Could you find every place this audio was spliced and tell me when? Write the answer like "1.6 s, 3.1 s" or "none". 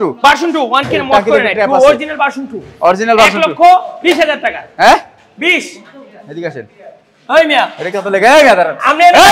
none